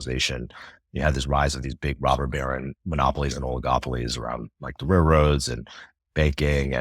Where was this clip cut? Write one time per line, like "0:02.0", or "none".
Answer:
0:02.8